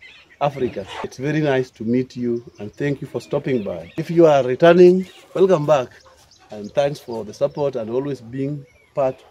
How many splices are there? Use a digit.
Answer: 2